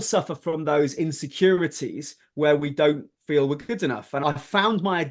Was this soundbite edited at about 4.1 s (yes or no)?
yes